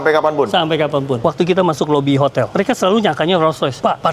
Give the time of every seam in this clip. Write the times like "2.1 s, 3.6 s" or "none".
1.2 s, 2.5 s